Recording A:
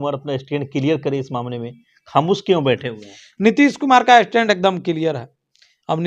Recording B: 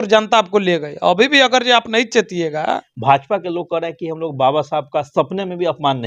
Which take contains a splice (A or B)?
B